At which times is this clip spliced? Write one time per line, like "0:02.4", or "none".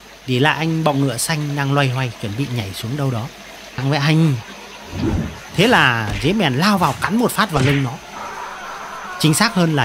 0:03.8